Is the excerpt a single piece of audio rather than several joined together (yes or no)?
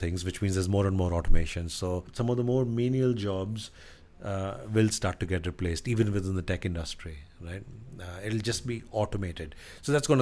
yes